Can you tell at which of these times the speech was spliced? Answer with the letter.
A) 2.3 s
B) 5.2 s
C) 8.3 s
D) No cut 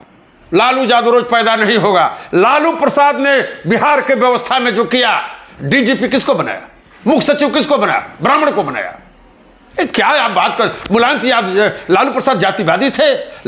D